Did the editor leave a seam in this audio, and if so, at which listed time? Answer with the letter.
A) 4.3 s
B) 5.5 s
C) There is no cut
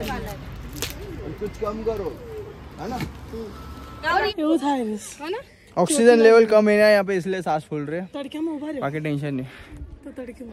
A